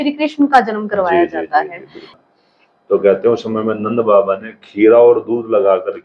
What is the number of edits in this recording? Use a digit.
1